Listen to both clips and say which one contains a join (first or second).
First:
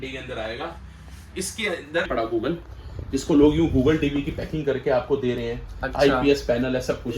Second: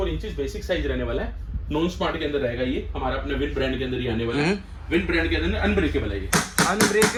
first